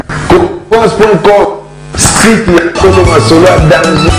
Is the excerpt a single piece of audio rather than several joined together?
yes; 0 cuts

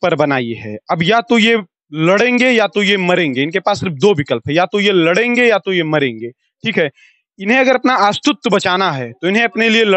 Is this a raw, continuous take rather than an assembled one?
yes; 0 cuts

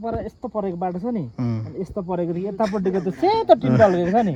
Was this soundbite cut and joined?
no; 0 cuts

